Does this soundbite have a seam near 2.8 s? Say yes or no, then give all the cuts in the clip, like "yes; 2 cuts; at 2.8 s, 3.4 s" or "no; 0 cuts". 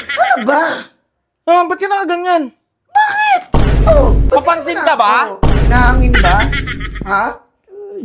no; 1 cut; at 4.2 s